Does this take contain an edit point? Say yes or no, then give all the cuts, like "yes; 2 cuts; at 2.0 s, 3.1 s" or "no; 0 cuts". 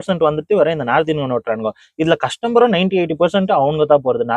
no; 0 cuts